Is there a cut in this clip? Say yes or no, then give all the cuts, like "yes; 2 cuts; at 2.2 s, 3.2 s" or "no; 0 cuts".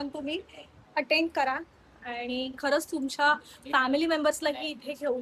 no; 0 cuts